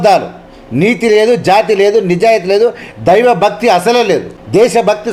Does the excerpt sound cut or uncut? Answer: uncut